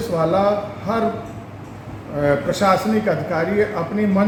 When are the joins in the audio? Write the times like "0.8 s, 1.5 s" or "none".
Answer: none

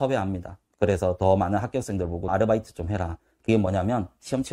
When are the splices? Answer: 2.3 s

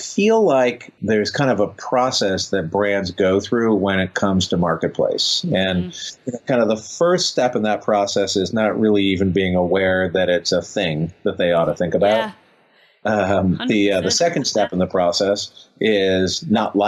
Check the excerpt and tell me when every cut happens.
0.9 s

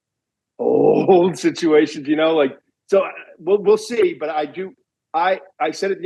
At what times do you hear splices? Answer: none

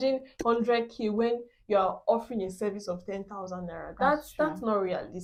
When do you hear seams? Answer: none

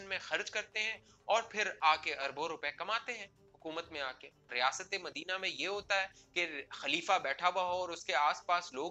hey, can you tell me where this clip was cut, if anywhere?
4.5 s

